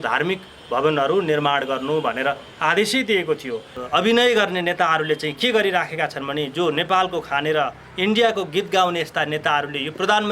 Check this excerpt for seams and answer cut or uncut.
cut